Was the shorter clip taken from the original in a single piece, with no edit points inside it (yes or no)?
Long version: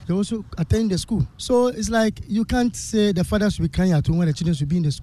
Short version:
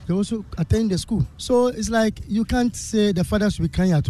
yes